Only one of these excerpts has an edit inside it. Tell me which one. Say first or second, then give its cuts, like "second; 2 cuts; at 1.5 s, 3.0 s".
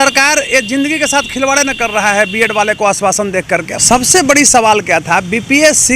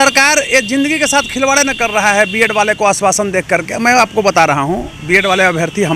first; 1 cut; at 3.7 s